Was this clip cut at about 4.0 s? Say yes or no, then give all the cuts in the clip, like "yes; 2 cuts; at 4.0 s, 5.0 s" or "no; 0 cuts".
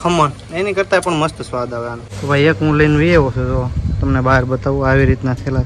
no; 1 cut; at 2.1 s